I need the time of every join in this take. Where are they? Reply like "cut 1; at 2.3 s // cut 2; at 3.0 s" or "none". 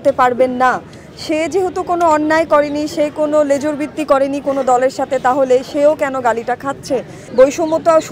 cut 1; at 7.2 s

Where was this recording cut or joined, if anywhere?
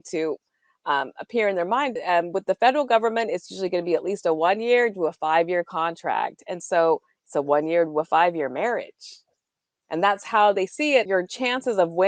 cut 1; at 2.0 s // cut 2; at 11.1 s

